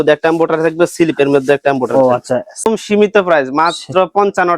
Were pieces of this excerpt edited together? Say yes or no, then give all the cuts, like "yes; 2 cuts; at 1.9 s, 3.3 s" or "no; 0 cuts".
yes; 1 cut; at 2.7 s